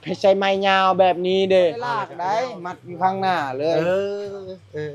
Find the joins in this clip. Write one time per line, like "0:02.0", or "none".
0:02.1